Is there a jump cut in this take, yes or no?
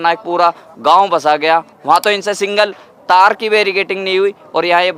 no